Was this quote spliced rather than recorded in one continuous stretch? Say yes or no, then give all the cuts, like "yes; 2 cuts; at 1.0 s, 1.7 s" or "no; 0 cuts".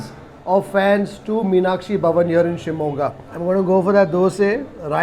no; 0 cuts